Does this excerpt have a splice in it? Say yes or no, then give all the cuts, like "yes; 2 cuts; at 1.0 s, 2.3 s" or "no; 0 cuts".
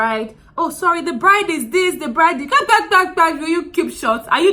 no; 0 cuts